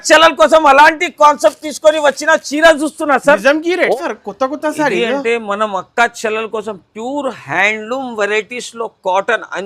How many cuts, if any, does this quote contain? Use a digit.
1